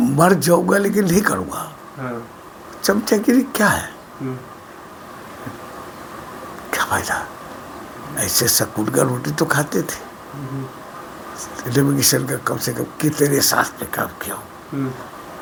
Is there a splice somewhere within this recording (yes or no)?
no